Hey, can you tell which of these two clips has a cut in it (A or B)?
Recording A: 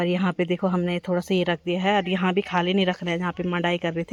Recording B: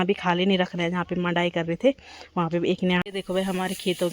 B